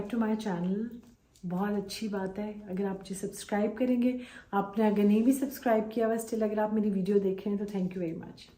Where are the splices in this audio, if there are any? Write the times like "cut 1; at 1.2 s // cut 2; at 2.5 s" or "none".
none